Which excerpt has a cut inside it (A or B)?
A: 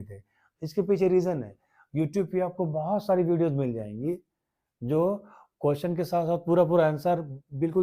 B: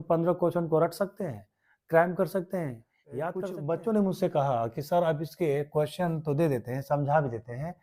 B